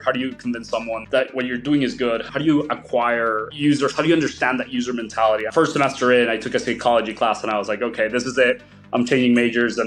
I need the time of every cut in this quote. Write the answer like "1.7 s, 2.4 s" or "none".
1.3 s, 5.5 s